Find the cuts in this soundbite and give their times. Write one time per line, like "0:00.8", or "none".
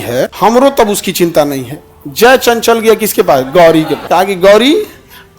0:04.0